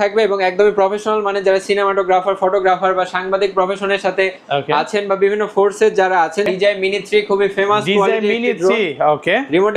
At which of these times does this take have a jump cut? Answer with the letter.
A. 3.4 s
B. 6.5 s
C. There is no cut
B